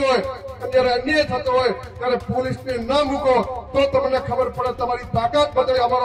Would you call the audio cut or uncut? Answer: uncut